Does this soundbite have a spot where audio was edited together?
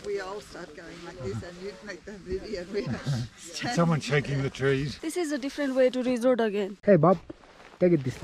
yes; 2 cuts; at 4.9 s, 6.7 s

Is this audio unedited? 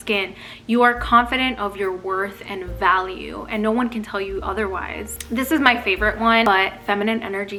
yes; 0 cuts

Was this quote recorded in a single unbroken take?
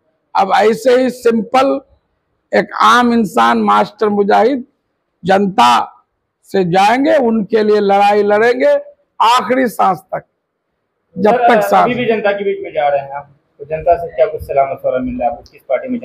yes; 0 cuts

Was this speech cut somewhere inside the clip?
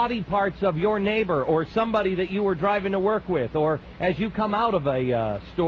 yes; 1 cut; at 3.9 s

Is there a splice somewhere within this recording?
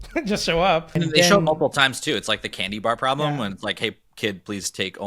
yes; 1 cut; at 1.0 s

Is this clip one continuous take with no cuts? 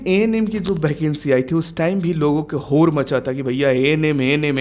yes; 0 cuts

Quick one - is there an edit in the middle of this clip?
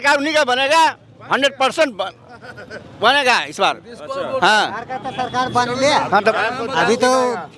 no; 0 cuts

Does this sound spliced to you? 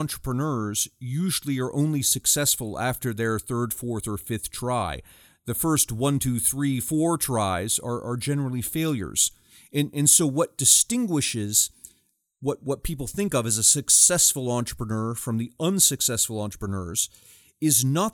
no; 0 cuts

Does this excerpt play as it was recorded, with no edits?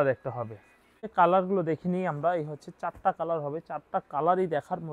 no; 1 cut; at 1.0 s

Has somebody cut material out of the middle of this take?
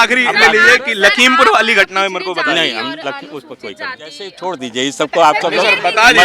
yes; 1 cut; at 4.3 s

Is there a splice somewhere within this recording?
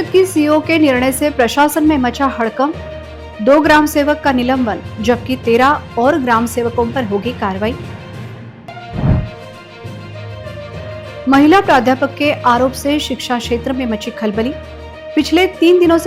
no; 0 cuts

